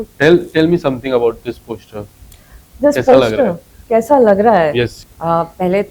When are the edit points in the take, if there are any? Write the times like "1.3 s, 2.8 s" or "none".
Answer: 5.0 s